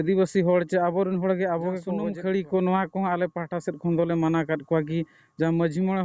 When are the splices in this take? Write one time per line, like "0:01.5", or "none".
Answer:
0:02.0